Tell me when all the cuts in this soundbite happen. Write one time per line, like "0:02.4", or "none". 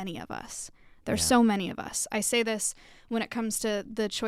none